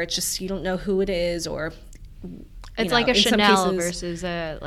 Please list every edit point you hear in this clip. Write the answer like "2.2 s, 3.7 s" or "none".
none